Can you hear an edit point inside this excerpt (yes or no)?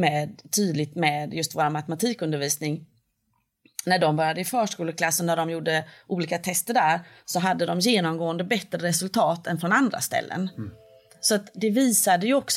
yes